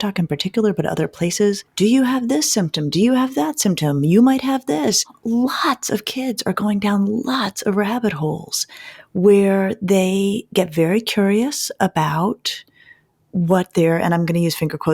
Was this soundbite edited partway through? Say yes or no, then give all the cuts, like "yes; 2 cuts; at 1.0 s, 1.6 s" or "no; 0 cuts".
yes; 2 cuts; at 1.7 s, 5.1 s